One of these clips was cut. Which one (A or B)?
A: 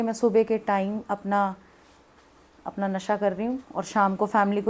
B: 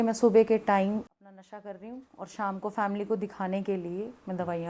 B